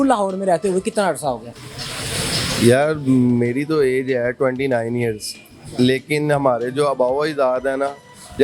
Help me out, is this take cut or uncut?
uncut